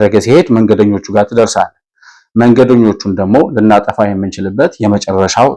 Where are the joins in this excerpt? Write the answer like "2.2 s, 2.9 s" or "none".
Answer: none